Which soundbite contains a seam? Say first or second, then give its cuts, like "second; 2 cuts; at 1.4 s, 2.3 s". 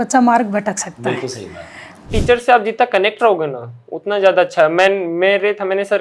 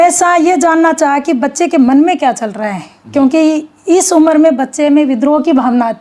first; 1 cut; at 2.1 s